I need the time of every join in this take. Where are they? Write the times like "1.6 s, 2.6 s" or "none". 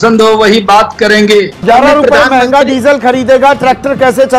1.6 s